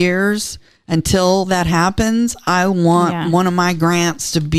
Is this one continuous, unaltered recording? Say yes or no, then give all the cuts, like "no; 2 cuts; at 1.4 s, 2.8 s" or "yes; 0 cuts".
yes; 0 cuts